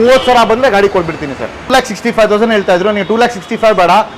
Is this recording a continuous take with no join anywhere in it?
no; 1 cut; at 1.7 s

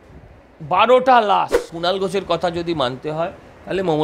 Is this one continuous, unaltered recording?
no; 1 cut; at 1.7 s

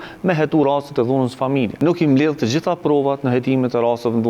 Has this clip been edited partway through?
yes; 1 cut; at 1.7 s

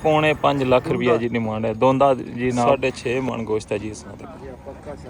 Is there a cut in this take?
yes; 1 cut; at 2.7 s

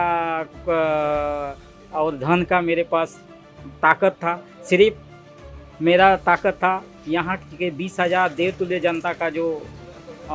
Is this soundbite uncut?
yes; 0 cuts

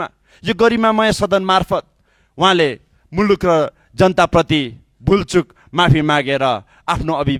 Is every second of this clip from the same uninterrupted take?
yes; 0 cuts

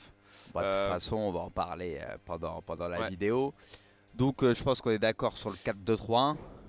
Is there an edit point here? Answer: yes; 1 cut; at 5.3 s

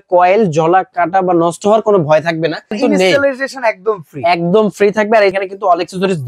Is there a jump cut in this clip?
yes; 2 cuts; at 2.8 s, 5.3 s

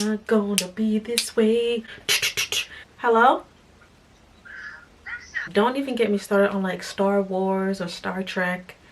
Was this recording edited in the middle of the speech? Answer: yes; 1 cut; at 2.9 s

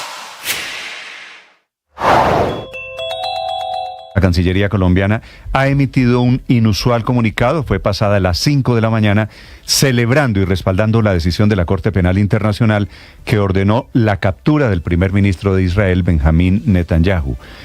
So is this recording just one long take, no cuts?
no; 1 cut; at 3.9 s

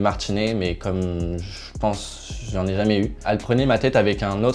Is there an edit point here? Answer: yes; 1 cut; at 3.2 s

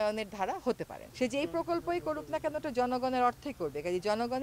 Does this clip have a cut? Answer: yes; 1 cut; at 1.0 s

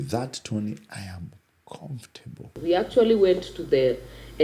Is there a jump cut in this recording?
yes; 1 cut; at 2.5 s

